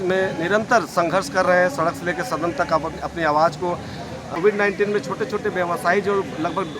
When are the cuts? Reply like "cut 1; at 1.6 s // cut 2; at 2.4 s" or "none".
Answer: cut 1; at 4.3 s